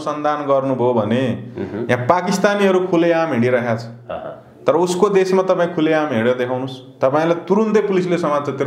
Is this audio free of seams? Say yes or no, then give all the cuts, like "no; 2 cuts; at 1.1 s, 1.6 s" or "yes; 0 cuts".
yes; 0 cuts